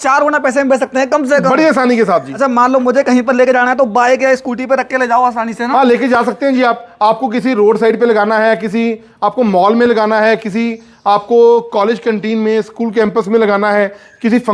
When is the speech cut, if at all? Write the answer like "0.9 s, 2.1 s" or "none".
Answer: none